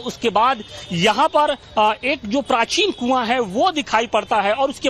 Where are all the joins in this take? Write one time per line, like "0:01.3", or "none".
0:03.3